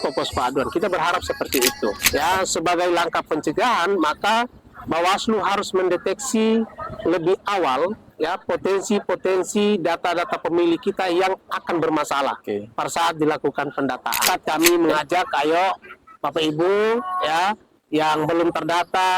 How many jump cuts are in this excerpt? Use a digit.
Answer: 2